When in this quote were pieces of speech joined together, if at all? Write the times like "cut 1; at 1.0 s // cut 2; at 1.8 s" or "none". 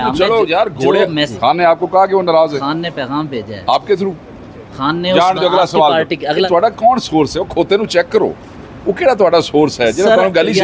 cut 1; at 1.2 s // cut 2; at 6.5 s

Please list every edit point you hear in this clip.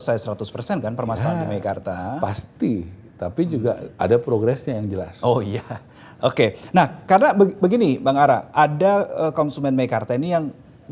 none

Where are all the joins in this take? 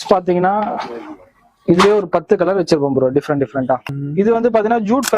cut 1; at 3.8 s

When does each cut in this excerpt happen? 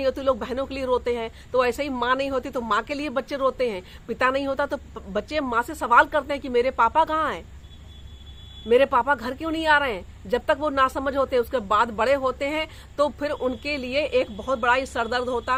none

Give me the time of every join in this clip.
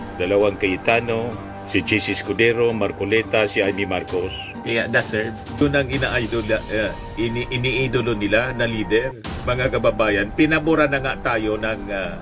cut 1; at 5.5 s

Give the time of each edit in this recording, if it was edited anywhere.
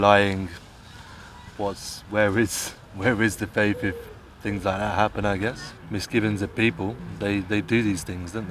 cut 1; at 5.7 s

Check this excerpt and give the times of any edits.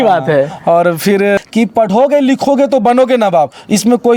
cut 1; at 1.4 s

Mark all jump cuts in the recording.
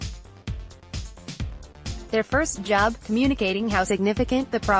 cut 1; at 1.6 s

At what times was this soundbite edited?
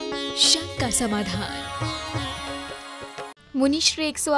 cut 1; at 3.4 s

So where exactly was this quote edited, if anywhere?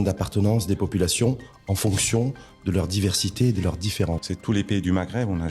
cut 1; at 4.3 s

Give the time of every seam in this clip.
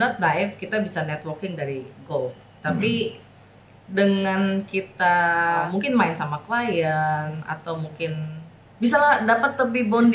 cut 1; at 5.7 s // cut 2; at 8.6 s

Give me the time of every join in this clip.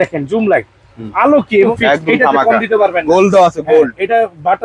cut 1; at 1.7 s

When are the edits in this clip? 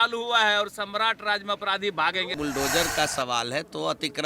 cut 1; at 2.3 s

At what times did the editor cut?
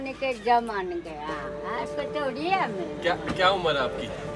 none

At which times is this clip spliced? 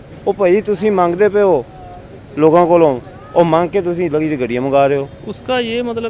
cut 1; at 5.2 s

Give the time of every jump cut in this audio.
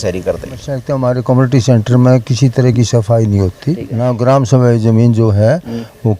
cut 1; at 0.9 s // cut 2; at 4.1 s

